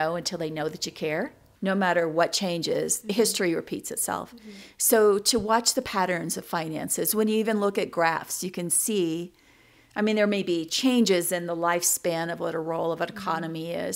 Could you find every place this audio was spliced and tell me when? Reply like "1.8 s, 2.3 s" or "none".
1.4 s